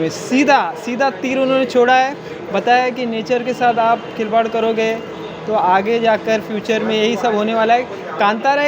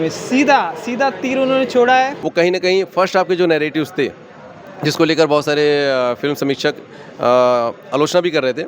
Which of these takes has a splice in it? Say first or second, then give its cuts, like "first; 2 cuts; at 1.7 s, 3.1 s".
second; 1 cut; at 2.2 s